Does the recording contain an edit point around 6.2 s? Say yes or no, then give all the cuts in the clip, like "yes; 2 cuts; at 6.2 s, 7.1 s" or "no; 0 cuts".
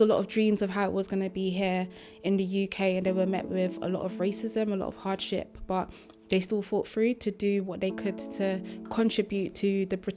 no; 0 cuts